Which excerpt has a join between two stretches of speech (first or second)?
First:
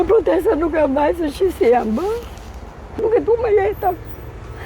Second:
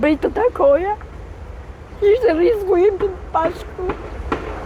first